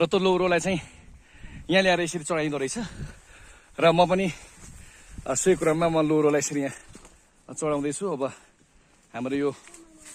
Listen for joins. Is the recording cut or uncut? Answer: uncut